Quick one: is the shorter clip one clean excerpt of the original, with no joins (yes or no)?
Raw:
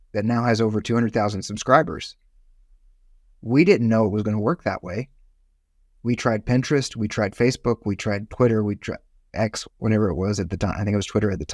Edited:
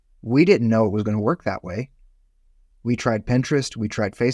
yes